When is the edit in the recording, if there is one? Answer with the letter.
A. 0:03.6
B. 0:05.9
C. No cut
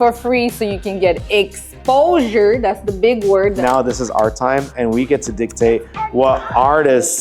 A